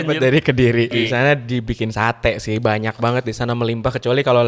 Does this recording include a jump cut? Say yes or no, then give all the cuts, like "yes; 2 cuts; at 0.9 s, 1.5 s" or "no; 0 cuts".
yes; 1 cut; at 0.9 s